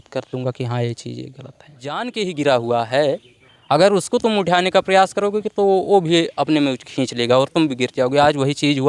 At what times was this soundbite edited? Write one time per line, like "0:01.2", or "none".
0:02.0